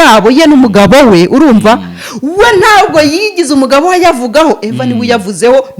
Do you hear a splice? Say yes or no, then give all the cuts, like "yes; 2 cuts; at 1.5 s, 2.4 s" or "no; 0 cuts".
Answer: no; 0 cuts